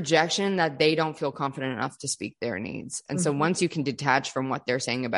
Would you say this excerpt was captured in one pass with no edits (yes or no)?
yes